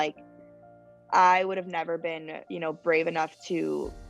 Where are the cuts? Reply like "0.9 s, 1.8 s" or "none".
none